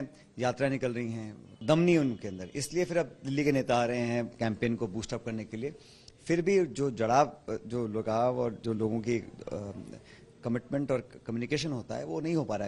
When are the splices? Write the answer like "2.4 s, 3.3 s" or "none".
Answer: 1.5 s